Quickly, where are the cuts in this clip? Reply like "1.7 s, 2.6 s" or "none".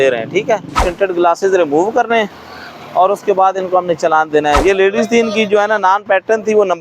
0.8 s, 4.6 s